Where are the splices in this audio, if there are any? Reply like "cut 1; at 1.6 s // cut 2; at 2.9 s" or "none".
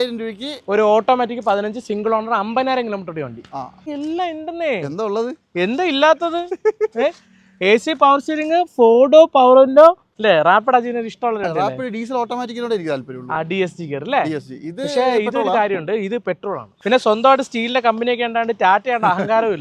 cut 1; at 3.8 s // cut 2; at 10.1 s // cut 3; at 16.7 s